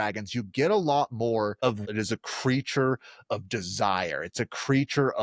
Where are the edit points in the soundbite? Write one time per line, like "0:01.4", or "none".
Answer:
0:01.8